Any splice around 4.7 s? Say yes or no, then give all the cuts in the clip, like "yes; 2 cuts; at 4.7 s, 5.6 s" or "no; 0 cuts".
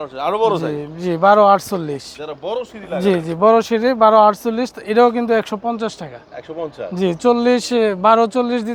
no; 0 cuts